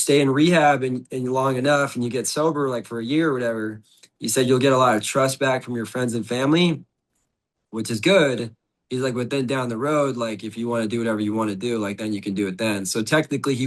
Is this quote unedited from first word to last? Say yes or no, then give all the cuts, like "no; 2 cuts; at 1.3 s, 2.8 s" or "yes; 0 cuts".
yes; 0 cuts